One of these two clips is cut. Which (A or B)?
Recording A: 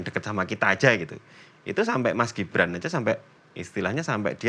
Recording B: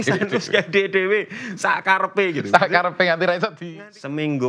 B